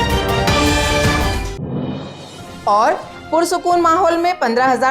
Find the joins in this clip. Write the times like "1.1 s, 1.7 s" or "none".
1.2 s, 2.1 s